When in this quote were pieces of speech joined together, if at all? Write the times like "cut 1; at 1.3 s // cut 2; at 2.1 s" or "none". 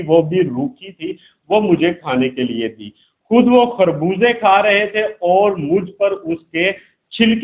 none